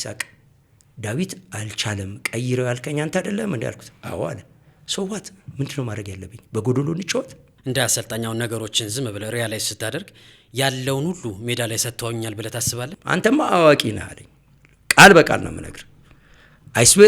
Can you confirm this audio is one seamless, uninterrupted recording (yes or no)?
no